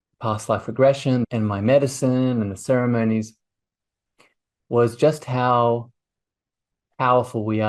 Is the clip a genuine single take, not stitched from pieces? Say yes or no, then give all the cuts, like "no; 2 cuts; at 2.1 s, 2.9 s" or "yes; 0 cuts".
yes; 0 cuts